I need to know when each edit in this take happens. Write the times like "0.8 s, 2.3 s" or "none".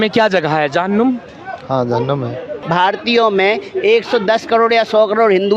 2.5 s